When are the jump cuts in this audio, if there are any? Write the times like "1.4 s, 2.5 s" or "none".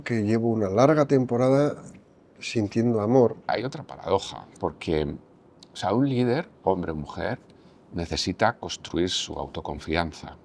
3.5 s